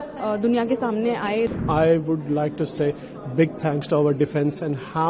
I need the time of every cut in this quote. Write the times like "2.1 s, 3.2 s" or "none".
1.5 s